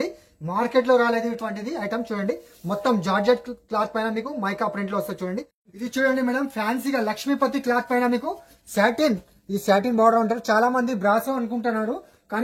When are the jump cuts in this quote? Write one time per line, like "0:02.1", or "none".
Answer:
0:05.8